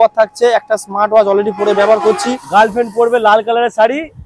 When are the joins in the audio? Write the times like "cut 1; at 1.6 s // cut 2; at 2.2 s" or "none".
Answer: cut 1; at 2.3 s